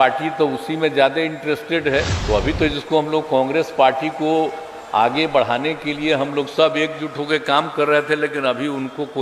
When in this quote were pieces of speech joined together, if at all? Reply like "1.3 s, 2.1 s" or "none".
2.1 s